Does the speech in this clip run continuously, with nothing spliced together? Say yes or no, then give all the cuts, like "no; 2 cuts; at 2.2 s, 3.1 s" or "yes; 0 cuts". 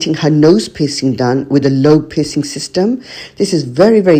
yes; 0 cuts